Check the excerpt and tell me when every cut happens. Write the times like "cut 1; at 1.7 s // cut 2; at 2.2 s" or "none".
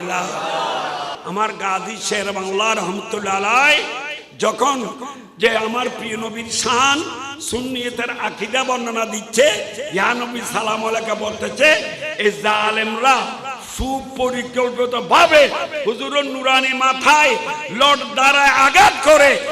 cut 1; at 1.2 s